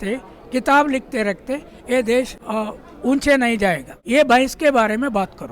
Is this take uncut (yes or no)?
no